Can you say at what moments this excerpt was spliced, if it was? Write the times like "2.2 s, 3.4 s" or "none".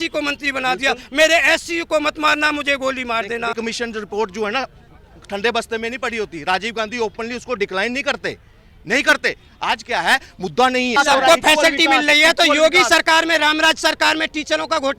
3.6 s, 11.0 s